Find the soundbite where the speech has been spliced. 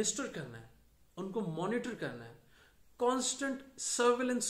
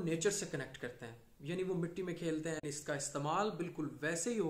second; 1 cut; at 2.6 s

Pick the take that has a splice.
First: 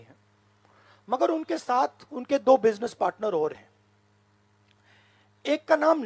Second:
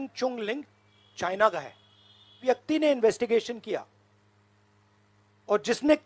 second; 1 cut; at 2.4 s

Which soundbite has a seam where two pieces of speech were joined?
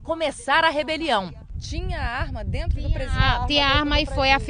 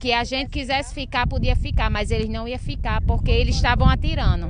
first; 1 cut; at 2.7 s

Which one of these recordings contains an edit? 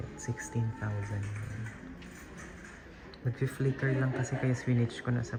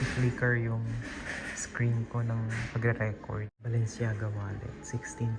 second; 1 cut; at 3.6 s

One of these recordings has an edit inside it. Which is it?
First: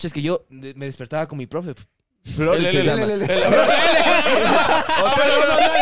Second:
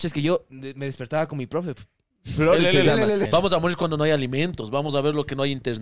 second; 1 cut; at 3.2 s

